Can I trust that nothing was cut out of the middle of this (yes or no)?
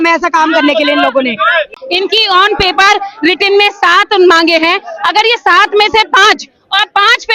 no